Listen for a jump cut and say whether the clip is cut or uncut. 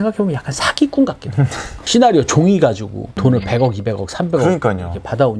uncut